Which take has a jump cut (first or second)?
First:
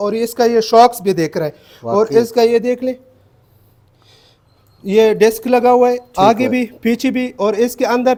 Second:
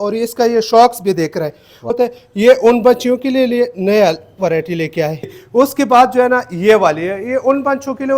second